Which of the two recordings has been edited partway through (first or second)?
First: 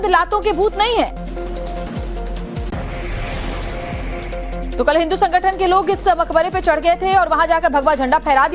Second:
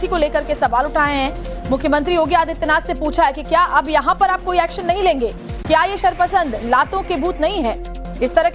second